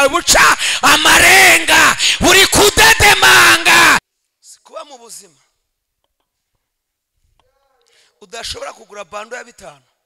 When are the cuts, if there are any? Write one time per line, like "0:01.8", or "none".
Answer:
0:04.1